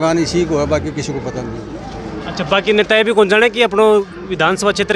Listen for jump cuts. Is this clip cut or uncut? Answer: uncut